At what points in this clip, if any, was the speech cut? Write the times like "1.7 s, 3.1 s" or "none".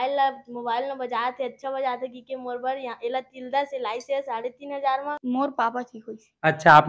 5.2 s